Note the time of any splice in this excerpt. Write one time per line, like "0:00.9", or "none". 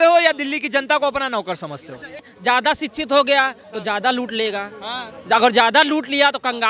0:02.3